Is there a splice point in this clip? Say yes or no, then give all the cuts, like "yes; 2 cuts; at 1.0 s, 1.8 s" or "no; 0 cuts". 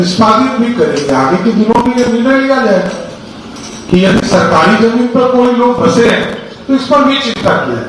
no; 0 cuts